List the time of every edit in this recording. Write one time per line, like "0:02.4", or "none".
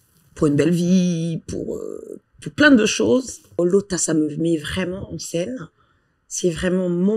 0:03.6